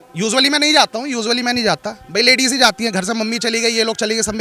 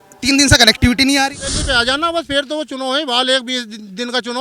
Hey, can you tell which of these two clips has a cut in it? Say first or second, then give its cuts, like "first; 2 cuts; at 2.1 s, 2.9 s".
second; 1 cut; at 1.6 s